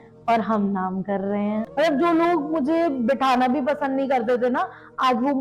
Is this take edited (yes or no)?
yes